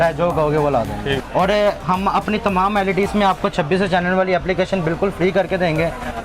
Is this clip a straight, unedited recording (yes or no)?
no